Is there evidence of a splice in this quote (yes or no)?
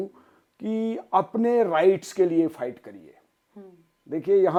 no